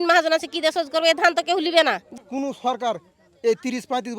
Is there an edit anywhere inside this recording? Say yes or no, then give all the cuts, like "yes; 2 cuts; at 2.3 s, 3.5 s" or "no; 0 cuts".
yes; 1 cut; at 2.1 s